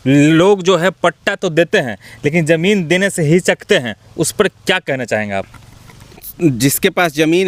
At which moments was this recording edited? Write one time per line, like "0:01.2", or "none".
none